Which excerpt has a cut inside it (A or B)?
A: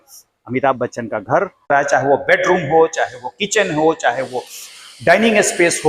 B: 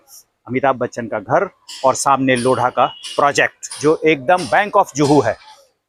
A